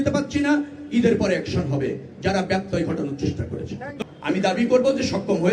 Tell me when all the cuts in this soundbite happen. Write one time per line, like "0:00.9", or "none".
0:03.9